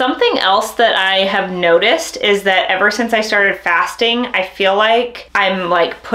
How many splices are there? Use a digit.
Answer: 0